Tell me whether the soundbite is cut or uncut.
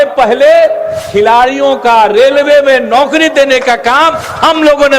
uncut